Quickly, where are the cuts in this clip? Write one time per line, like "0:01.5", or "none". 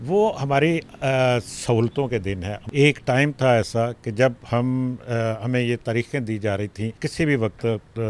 0:02.5
0:07.0